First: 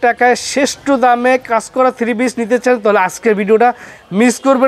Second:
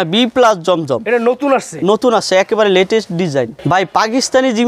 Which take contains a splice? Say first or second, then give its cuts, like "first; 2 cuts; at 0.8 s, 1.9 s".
second; 1 cut; at 3.6 s